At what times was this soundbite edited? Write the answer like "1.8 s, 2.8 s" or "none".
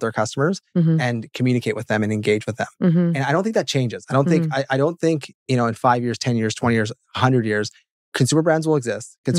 none